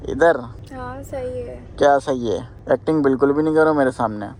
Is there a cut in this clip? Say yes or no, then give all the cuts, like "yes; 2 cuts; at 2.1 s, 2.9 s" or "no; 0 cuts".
no; 0 cuts